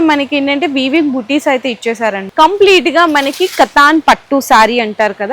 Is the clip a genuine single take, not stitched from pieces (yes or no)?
no